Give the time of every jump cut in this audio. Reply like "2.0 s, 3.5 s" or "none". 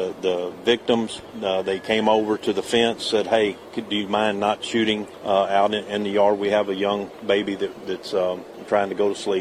5.1 s, 8.5 s